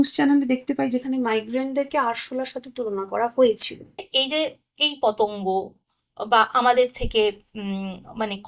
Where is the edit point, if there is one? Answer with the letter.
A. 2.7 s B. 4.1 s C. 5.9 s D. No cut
B